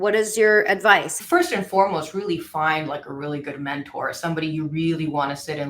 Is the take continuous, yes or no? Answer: no